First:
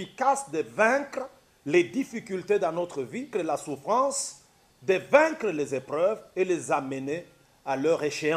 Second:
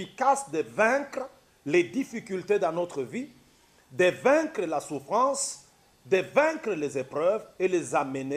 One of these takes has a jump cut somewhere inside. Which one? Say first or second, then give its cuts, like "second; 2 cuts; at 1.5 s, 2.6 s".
first; 1 cut; at 3.3 s